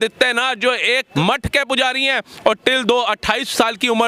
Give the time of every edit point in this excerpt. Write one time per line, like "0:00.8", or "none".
0:01.1